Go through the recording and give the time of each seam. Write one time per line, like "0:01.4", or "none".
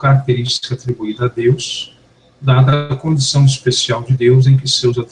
none